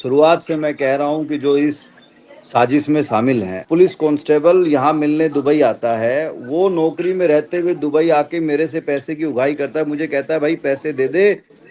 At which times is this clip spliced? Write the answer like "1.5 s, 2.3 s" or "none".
3.5 s